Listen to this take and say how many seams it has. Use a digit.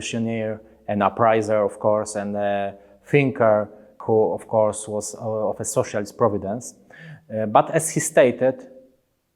1